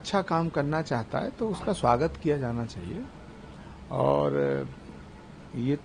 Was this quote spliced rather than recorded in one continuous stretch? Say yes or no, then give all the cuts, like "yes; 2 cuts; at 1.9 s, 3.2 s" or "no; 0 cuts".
no; 0 cuts